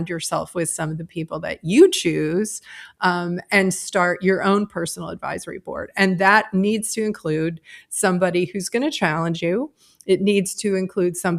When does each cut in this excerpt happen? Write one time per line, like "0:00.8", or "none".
none